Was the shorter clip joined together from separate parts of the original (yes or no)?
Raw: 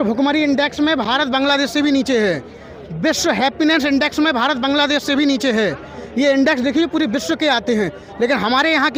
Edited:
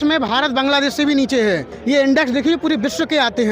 yes